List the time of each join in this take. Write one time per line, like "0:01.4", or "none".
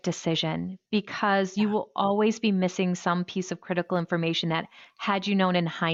none